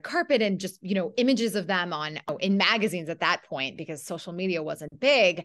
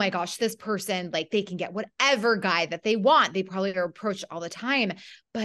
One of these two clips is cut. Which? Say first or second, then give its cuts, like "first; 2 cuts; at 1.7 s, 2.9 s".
first; 1 cut; at 2.3 s